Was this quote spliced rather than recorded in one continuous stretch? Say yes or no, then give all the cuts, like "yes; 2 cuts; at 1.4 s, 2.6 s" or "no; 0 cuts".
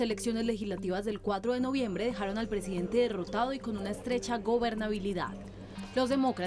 no; 0 cuts